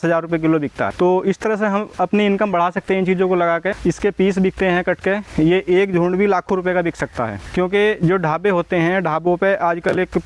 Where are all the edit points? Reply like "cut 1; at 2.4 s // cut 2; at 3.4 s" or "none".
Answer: cut 1; at 0.9 s // cut 2; at 3.7 s // cut 3; at 7.4 s